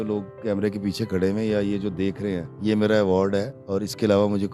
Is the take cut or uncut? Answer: cut